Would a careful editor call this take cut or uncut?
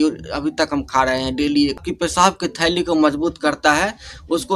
cut